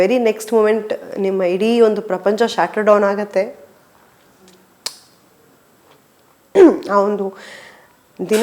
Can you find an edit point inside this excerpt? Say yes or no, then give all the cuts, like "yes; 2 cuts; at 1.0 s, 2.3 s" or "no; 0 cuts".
yes; 1 cut; at 6.4 s